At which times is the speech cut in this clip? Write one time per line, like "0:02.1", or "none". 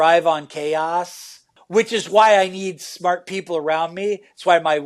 0:01.5